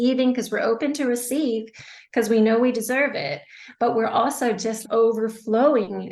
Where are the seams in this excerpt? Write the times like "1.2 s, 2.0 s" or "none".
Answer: 4.8 s